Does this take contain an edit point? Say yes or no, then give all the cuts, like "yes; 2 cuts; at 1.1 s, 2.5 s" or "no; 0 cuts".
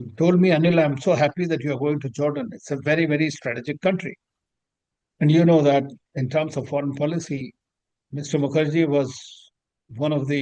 no; 0 cuts